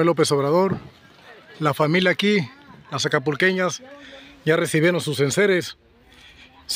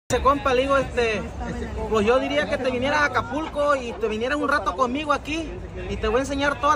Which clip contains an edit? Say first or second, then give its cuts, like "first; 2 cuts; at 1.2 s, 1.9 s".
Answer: second; 1 cut; at 0.9 s